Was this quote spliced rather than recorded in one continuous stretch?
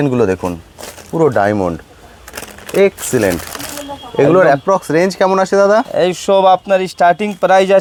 no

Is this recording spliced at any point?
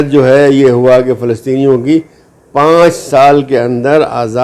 no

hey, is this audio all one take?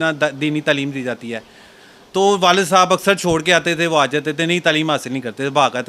yes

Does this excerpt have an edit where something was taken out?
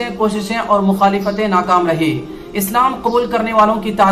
no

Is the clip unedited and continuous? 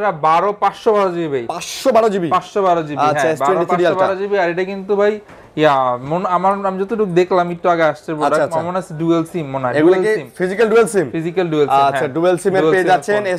yes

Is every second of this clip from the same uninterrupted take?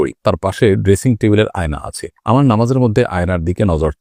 yes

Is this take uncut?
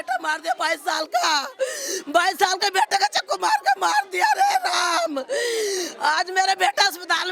yes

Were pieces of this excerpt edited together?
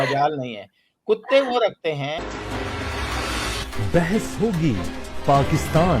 yes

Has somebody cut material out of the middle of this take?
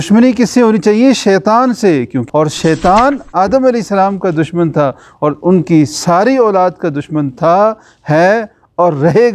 yes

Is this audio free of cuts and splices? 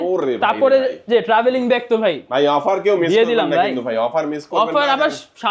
yes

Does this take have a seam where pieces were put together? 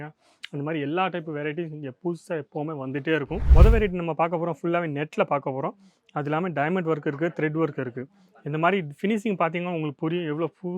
yes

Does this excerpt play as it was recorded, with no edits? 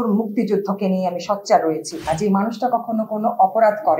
no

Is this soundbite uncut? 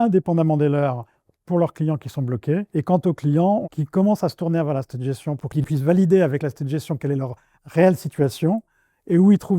no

